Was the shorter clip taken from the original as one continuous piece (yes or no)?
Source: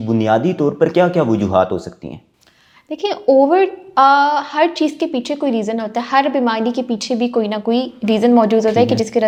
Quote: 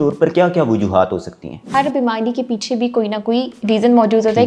no